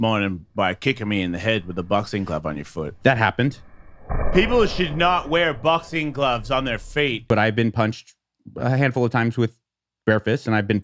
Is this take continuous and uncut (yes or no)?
no